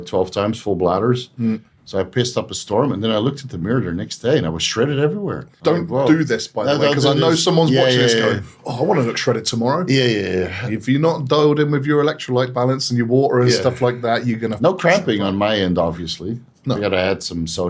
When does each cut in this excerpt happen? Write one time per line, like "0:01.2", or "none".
0:05.4